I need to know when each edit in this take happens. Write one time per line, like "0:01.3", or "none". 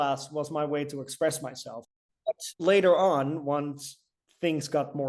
0:01.9